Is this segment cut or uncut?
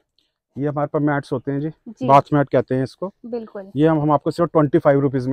uncut